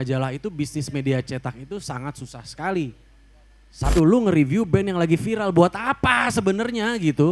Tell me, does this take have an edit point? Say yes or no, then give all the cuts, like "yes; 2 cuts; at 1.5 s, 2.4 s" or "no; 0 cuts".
yes; 1 cut; at 3.9 s